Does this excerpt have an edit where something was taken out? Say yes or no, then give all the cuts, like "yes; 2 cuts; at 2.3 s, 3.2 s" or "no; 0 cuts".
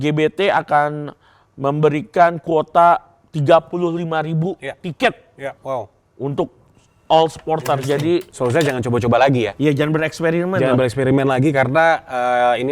yes; 1 cut; at 8.3 s